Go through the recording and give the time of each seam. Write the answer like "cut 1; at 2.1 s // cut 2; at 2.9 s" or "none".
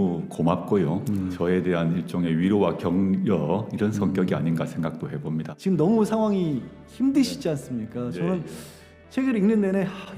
cut 1; at 1.3 s // cut 2; at 5.5 s